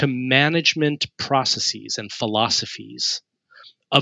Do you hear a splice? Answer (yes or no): no